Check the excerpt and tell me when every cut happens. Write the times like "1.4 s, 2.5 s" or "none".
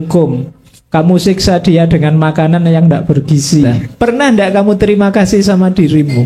3.8 s